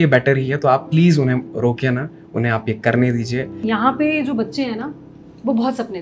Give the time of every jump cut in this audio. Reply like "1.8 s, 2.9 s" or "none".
3.6 s